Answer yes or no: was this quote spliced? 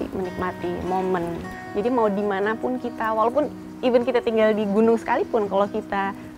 yes